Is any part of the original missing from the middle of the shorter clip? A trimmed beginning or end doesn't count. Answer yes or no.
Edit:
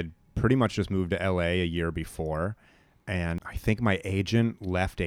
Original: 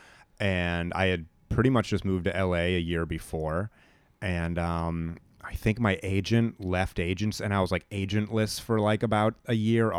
yes